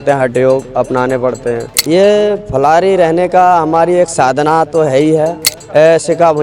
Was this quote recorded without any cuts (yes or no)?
no